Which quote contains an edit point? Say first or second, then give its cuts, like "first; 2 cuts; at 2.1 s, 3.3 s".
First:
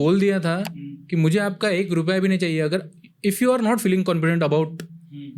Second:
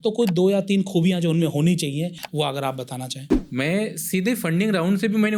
second; 2 cuts; at 2.2 s, 3.3 s